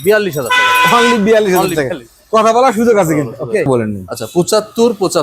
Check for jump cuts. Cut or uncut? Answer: cut